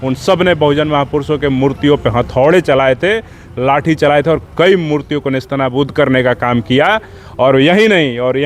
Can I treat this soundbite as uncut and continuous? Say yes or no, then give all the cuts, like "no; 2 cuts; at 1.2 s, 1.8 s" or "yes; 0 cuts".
yes; 0 cuts